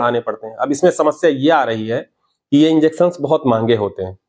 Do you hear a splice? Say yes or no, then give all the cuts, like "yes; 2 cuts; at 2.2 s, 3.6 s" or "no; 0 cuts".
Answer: no; 0 cuts